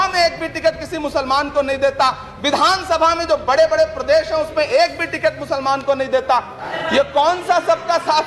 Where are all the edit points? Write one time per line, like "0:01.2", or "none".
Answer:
0:06.7